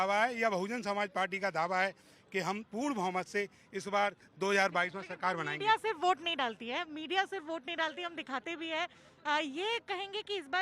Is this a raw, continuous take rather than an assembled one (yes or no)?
yes